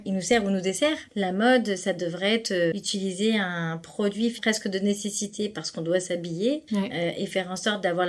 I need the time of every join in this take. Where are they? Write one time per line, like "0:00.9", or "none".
0:01.0
0:02.7
0:04.4
0:06.6